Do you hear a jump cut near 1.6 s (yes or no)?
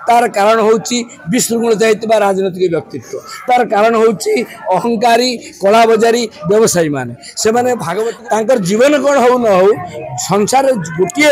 no